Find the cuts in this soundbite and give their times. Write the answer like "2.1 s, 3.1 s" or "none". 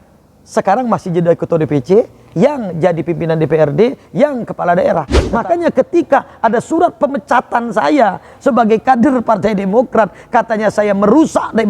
5.2 s